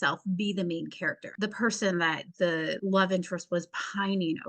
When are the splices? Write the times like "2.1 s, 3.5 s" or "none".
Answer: 1.2 s, 2.6 s